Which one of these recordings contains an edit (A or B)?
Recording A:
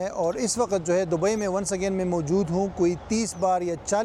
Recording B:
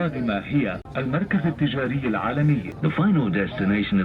B